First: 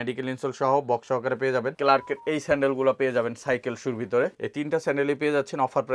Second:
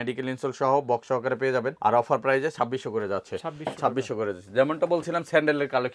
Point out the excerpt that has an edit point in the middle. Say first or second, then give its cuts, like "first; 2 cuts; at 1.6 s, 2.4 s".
first; 2 cuts; at 1.7 s, 4.4 s